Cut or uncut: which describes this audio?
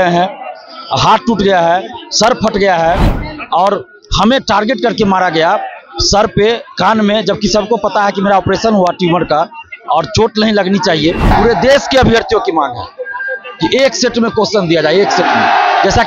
cut